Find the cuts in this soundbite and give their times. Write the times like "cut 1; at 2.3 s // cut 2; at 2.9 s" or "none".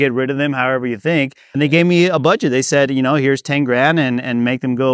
cut 1; at 1.6 s